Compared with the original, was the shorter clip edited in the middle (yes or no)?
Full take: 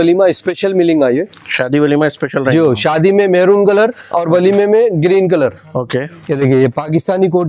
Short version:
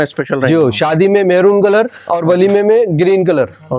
no